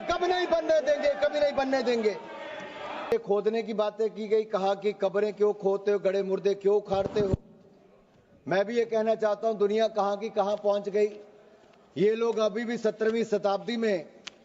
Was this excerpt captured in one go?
no; 1 cut; at 3.1 s

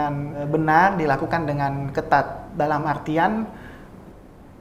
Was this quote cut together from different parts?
no; 0 cuts

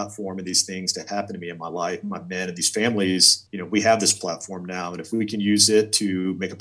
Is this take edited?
yes; 1 cut; at 3.4 s

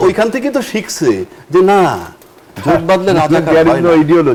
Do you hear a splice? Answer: no; 0 cuts

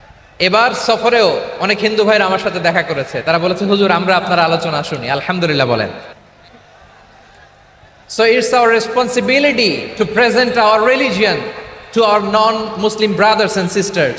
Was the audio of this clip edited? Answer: no; 0 cuts

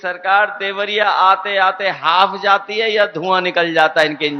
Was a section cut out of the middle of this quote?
no; 0 cuts

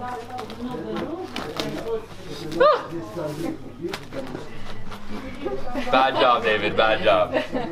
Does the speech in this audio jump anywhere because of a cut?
no; 0 cuts

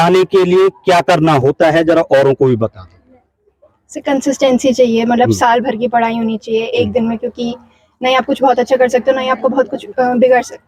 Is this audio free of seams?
yes; 0 cuts

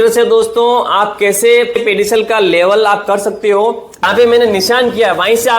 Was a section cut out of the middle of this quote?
yes; 1 cut; at 4.0 s

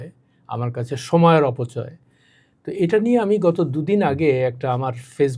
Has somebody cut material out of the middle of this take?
no; 0 cuts

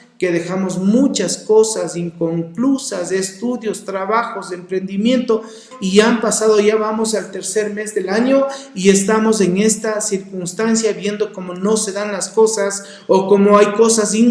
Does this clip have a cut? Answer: yes; 1 cut; at 5.7 s

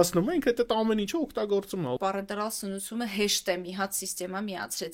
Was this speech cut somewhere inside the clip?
yes; 1 cut; at 2.0 s

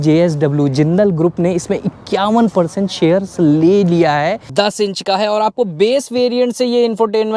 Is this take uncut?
no; 1 cut; at 4.5 s

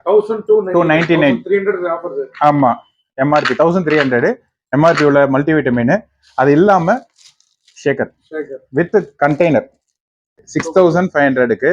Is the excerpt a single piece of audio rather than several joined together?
no; 1 cut; at 10.4 s

